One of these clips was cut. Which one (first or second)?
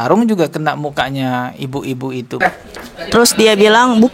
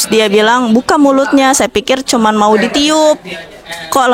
first